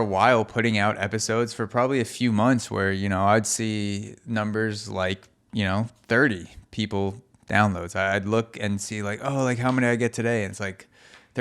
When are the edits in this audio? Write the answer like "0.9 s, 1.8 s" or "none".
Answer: 7.3 s